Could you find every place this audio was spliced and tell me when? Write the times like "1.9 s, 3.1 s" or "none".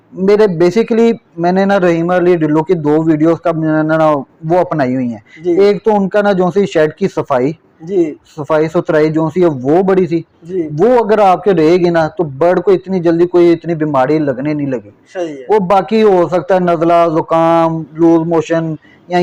none